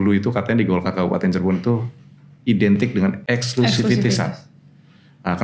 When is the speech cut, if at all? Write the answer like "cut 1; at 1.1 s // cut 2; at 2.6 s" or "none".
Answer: cut 1; at 3.2 s